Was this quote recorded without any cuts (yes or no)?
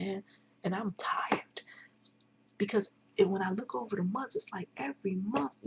yes